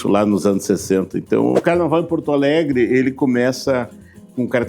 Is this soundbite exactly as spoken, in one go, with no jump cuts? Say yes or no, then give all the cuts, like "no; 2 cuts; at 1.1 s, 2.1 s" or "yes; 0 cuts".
no; 1 cut; at 1.6 s